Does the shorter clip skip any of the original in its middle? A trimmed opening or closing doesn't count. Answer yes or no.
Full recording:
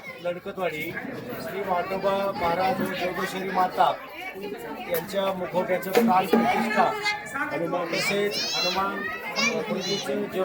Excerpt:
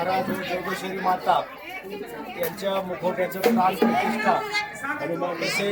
no